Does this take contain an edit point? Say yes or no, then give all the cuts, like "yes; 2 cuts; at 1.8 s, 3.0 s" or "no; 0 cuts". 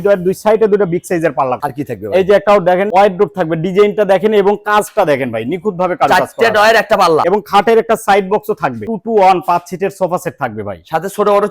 yes; 4 cuts; at 1.6 s, 2.9 s, 7.2 s, 8.9 s